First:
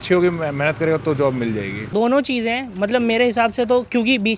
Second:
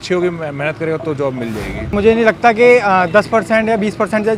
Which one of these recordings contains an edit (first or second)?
second